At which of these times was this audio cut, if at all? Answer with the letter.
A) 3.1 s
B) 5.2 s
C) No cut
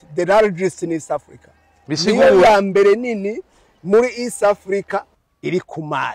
B